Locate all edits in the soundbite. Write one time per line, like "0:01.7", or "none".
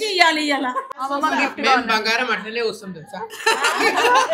0:01.0